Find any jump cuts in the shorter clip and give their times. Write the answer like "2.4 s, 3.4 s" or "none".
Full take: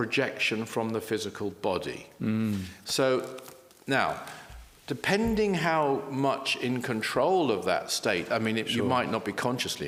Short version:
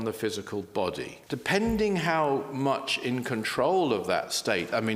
1.1 s

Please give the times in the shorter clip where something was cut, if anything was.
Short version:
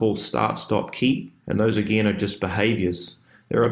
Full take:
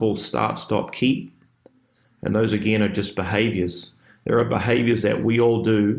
1.3 s

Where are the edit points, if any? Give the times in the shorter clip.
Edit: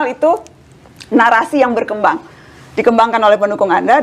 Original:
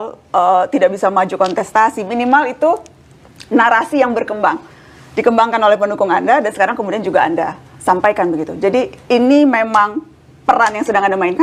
none

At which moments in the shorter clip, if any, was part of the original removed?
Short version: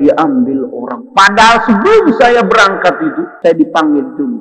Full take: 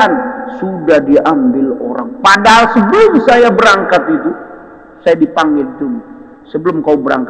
3.3 s

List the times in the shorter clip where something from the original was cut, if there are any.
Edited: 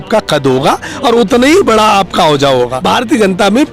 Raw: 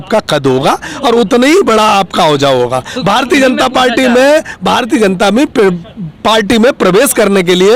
2.8 s

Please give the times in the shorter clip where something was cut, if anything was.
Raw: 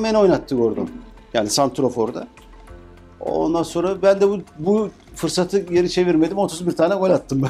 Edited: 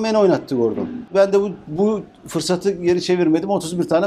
1.1 s

